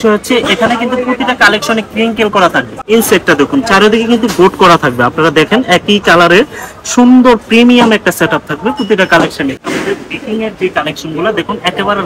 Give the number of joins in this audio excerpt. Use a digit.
2